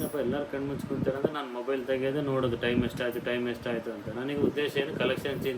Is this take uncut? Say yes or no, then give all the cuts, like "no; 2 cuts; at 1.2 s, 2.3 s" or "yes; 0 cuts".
yes; 0 cuts